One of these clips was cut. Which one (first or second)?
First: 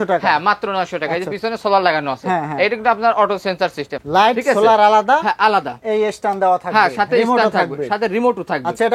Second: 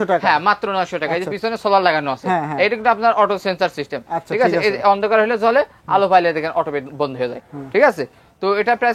first